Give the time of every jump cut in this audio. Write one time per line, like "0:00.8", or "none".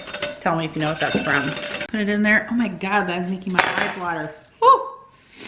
0:01.7